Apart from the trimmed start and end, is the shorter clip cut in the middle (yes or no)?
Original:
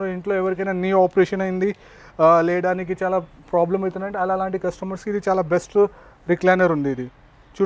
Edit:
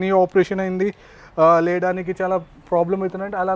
no